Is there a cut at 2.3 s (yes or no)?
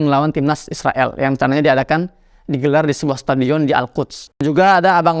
no